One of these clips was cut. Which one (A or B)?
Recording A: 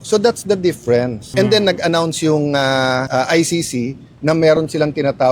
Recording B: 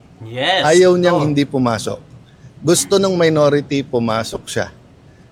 A